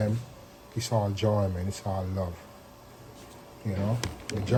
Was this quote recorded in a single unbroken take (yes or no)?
yes